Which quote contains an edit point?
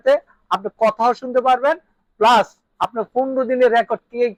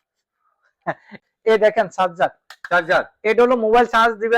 second; 1 cut; at 1.2 s

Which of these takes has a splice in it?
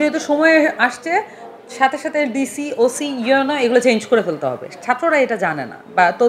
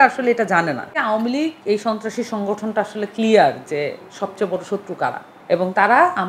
second; 1 cut; at 1.0 s

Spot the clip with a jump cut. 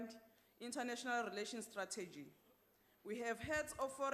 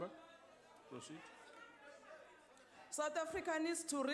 second; 1 cut; at 2.6 s

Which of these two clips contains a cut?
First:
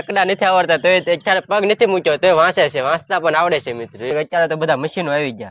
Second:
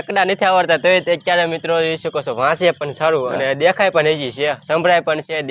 first; 2 cuts; at 1.2 s, 4.1 s

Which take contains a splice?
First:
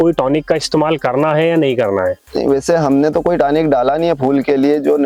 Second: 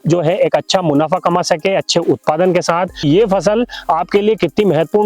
second; 1 cut; at 3.0 s

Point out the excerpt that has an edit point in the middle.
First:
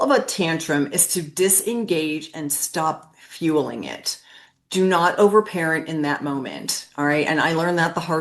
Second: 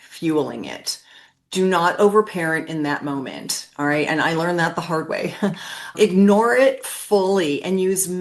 second; 1 cut; at 5.9 s

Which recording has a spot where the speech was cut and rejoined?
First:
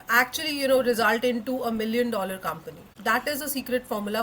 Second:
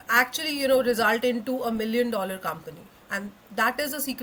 first; 1 cut; at 2.9 s

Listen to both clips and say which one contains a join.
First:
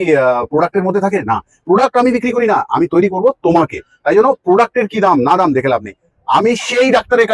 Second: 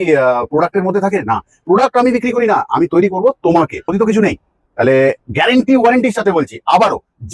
second; 1 cut; at 3.8 s

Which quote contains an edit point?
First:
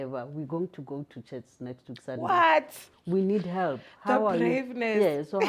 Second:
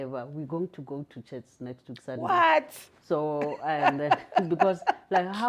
first; 1 cut; at 2.9 s

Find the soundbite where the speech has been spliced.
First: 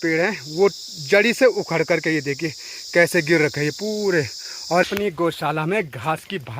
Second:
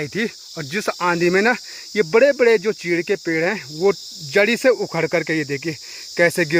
first; 1 cut; at 4.8 s

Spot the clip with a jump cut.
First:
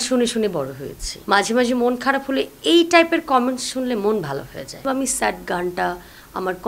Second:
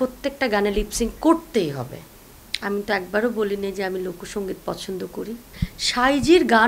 first; 2 cuts; at 1.1 s, 4.8 s

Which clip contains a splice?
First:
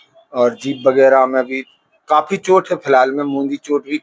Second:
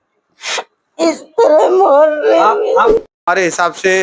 second; 1 cut; at 3.0 s

